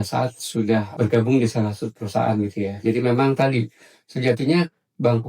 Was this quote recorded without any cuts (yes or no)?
no